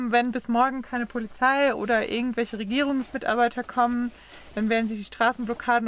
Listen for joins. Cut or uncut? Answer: uncut